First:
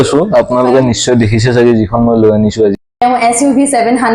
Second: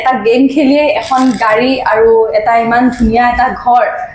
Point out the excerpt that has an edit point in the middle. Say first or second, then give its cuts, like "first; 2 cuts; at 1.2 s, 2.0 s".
first; 1 cut; at 2.8 s